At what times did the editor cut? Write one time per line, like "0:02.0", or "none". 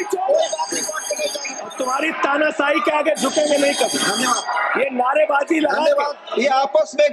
0:01.7
0:06.2